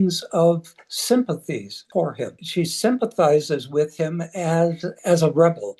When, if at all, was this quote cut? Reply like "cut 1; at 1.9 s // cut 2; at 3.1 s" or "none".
cut 1; at 1.8 s // cut 2; at 2.4 s // cut 3; at 4.9 s